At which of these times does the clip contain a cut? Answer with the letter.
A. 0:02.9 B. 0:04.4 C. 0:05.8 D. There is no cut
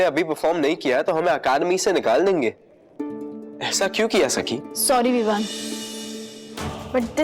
D